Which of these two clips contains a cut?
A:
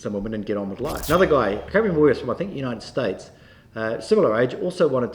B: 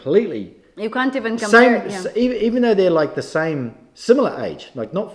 A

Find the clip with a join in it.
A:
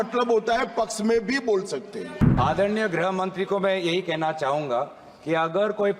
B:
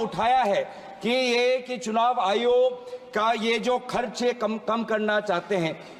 A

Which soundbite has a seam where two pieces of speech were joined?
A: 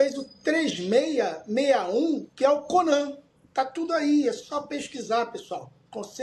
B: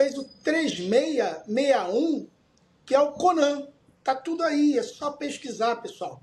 A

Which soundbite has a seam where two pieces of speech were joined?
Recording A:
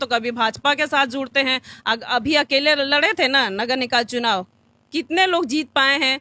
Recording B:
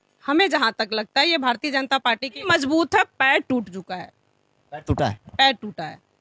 B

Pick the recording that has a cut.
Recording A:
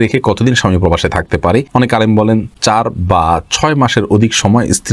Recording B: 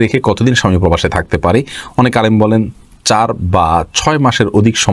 A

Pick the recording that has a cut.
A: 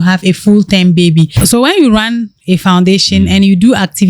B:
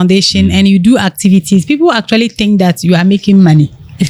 A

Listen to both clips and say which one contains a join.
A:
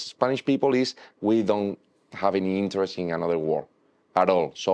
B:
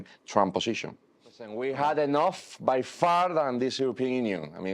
B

